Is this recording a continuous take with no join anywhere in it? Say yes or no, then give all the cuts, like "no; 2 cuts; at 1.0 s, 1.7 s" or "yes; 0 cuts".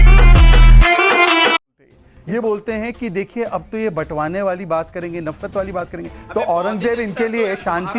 no; 1 cut; at 1.6 s